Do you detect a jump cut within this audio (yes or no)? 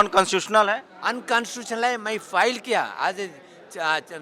no